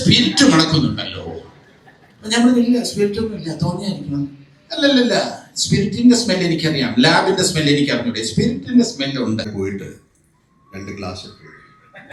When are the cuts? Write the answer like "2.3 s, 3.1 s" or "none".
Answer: 9.5 s